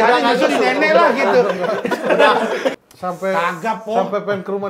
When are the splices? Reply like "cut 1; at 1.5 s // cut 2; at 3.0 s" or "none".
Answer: cut 1; at 2.8 s